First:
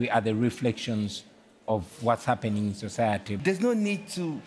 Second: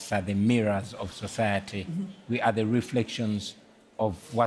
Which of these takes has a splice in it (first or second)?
first